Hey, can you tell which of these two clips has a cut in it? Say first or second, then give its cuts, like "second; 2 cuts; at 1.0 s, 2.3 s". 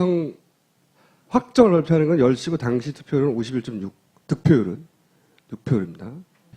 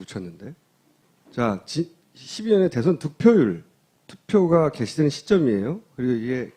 first; 1 cut; at 2.2 s